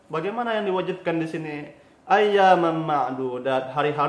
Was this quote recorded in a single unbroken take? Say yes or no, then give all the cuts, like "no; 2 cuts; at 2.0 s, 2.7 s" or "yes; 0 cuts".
yes; 0 cuts